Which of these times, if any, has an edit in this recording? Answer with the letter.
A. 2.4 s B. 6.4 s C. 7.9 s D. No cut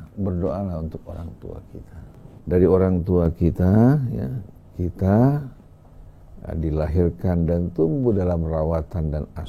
A